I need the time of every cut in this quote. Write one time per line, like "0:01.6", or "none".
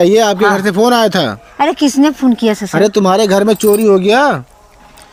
none